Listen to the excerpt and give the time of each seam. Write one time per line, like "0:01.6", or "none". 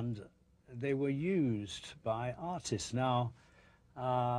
0:01.9